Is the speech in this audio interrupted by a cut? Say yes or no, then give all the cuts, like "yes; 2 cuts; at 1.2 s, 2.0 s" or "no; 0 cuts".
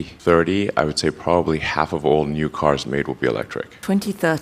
no; 0 cuts